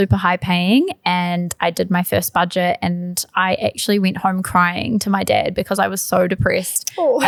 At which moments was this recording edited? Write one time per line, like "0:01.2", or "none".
none